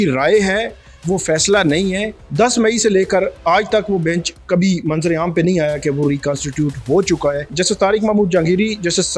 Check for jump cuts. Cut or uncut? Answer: cut